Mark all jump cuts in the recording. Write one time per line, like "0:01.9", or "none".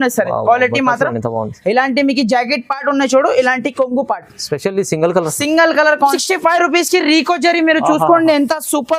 0:06.1